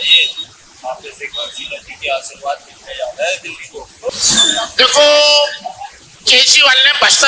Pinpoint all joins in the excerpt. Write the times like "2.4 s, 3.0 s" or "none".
4.1 s